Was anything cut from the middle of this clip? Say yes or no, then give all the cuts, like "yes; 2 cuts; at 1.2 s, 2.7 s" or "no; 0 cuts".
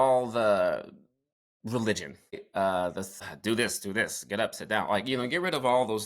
yes; 2 cuts; at 2.4 s, 3.3 s